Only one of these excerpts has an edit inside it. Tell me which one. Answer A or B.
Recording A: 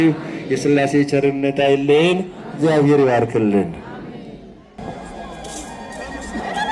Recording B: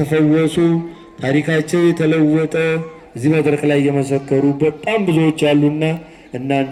A